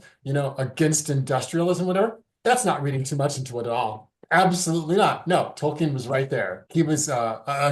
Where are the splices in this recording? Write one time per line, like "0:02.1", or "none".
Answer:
0:06.6